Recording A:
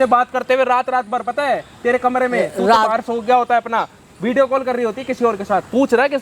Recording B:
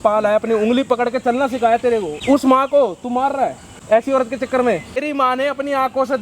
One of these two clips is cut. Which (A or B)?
B